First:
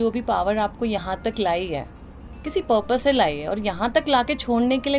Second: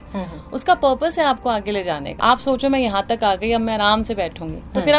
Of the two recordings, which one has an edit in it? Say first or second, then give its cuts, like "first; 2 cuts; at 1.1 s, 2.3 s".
second; 1 cut; at 2.1 s